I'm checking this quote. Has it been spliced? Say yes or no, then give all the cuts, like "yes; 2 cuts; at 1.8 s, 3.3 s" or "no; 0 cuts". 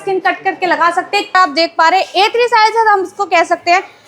yes; 1 cut; at 1.3 s